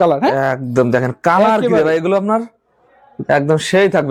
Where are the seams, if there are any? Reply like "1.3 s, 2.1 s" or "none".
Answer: none